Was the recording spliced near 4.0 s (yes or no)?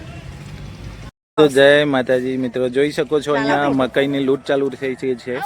no